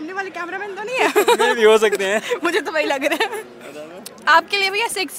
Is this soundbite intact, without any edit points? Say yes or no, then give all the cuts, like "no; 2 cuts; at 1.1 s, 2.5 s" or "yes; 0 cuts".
yes; 0 cuts